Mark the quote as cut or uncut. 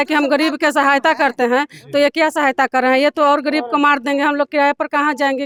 uncut